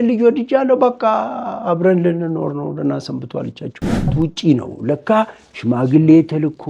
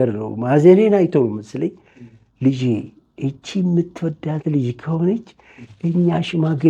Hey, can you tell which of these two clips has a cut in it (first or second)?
first